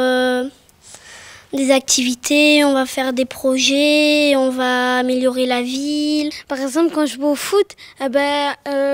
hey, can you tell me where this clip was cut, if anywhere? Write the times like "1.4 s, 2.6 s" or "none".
7.3 s